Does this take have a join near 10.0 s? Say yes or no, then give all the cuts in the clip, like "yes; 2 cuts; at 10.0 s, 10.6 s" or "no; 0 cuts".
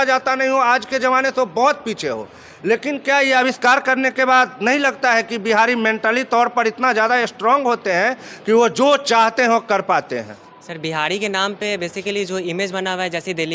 no; 0 cuts